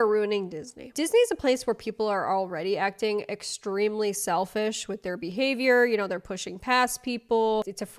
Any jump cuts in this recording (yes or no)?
yes